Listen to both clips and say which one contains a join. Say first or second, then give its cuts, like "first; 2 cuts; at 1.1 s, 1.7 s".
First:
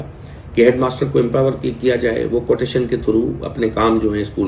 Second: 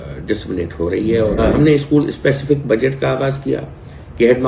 second; 1 cut; at 1.4 s